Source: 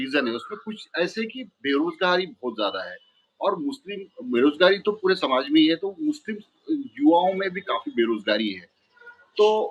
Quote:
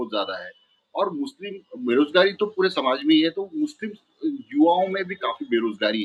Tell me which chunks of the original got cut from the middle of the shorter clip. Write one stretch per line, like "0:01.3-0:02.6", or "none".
none